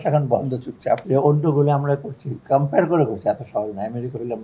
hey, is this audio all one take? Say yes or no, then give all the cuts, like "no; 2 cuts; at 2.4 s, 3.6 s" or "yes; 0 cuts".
no; 1 cut; at 1.0 s